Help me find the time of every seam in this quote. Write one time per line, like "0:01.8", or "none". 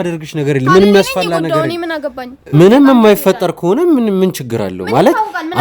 0:02.5